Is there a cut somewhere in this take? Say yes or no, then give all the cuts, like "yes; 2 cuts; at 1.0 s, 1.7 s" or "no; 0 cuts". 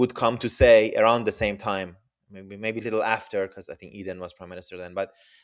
no; 0 cuts